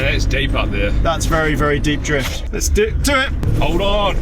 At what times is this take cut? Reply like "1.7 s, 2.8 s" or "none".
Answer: 2.4 s, 3.4 s